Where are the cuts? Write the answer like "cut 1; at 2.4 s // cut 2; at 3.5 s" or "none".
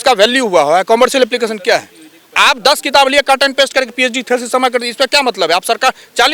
none